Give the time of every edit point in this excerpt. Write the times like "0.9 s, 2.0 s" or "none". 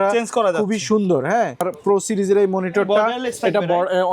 1.7 s

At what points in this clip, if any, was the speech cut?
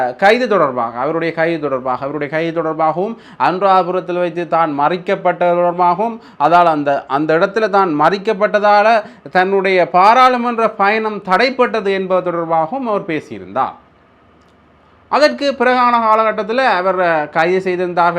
none

